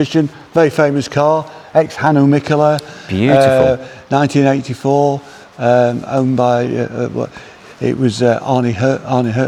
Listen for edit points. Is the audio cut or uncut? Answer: uncut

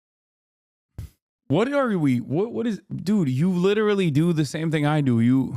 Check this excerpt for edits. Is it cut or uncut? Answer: cut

